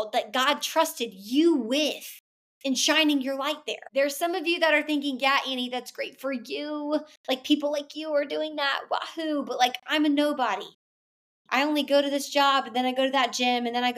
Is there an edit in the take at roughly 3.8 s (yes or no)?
yes